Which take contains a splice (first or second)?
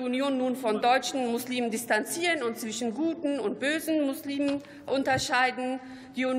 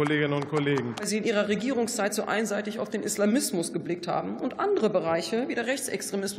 second